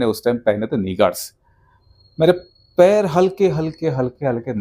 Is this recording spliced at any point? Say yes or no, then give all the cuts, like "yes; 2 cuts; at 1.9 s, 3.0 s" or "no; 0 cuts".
no; 0 cuts